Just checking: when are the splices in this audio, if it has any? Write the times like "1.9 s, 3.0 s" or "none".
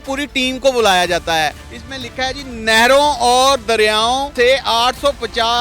1.7 s, 4.3 s